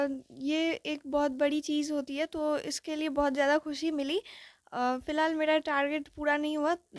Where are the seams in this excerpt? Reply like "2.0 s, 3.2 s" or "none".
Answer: none

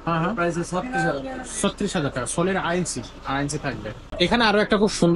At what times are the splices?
4.1 s

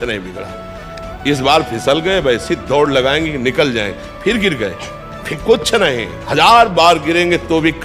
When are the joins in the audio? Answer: 6.1 s

